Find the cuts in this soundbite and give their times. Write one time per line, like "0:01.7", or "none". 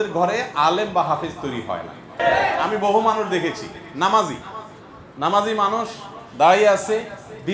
0:02.2